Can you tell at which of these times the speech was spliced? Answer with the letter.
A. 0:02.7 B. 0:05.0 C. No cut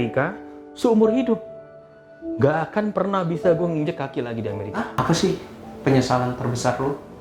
B